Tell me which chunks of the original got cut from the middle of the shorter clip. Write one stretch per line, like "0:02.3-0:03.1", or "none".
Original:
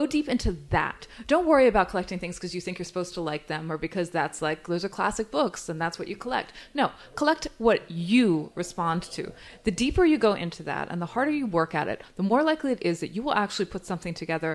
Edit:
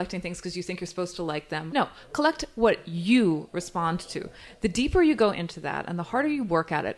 0:03.6-0:06.7